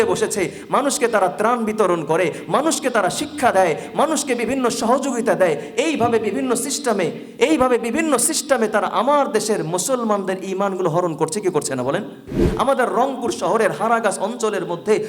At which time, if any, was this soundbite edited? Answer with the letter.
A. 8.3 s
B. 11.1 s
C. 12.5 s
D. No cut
C